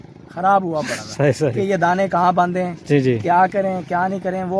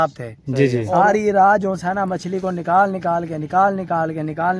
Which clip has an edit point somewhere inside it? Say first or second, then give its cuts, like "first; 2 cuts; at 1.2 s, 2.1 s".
second; 1 cut; at 0.9 s